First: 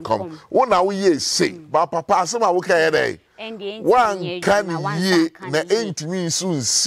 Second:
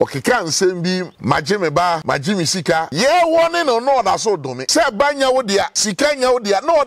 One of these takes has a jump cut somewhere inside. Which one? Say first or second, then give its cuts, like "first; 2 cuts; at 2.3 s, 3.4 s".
second; 4 cuts; at 1.1 s, 2.5 s, 4.6 s, 5.8 s